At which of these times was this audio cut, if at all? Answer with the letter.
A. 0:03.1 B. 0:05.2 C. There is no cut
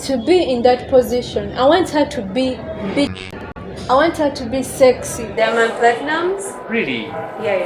B